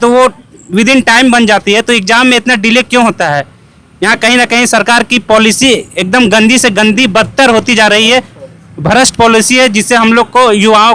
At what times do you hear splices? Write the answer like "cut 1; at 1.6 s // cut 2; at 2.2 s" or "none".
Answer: none

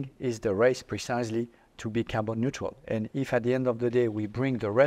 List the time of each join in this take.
none

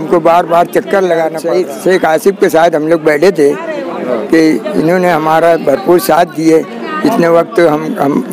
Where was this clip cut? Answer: cut 1; at 1.4 s

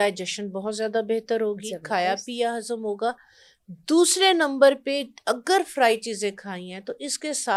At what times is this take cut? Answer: none

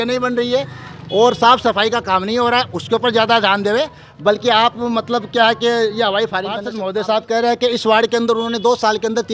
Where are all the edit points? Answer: cut 1; at 6.7 s

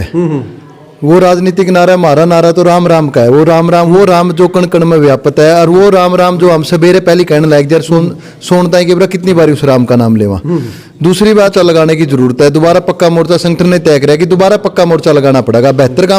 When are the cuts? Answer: cut 1; at 11.5 s

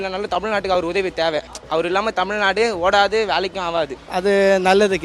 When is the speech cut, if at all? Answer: cut 1; at 1.5 s // cut 2; at 4.0 s

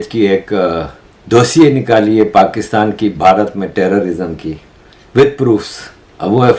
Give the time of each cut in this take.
none

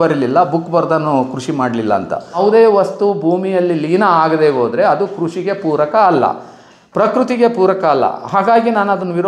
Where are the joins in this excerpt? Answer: cut 1; at 2.4 s

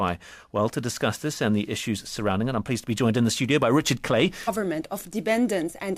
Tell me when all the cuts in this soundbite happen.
none

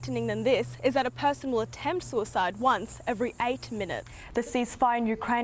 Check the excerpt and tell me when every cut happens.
none

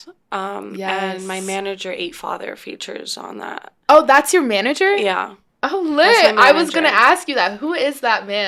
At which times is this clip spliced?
none

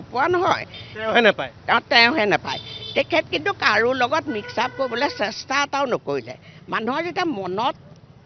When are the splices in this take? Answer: none

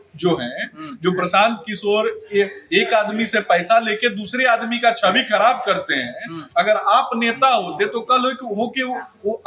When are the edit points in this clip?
none

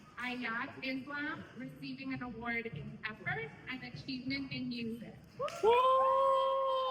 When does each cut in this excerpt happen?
none

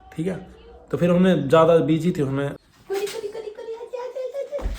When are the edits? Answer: cut 1; at 2.7 s

